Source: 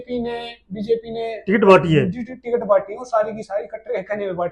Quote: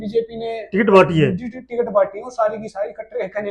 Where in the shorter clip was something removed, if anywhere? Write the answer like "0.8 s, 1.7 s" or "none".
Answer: none